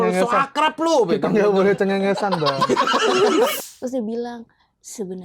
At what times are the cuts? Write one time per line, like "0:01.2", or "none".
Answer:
0:03.7

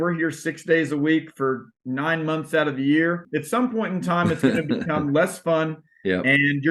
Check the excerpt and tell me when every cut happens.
0:03.2

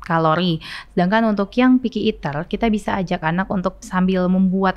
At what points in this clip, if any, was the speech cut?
0:03.8

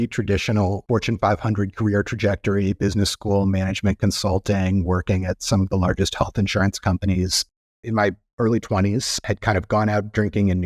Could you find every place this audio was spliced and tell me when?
0:00.8
0:07.4
0:09.2

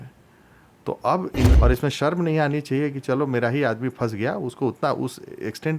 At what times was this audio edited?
0:01.5

